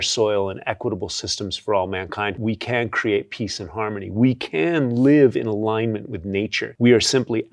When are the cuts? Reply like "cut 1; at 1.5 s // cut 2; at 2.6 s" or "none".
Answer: cut 1; at 2.4 s // cut 2; at 6.6 s